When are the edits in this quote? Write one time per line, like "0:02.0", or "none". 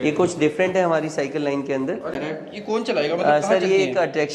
0:02.2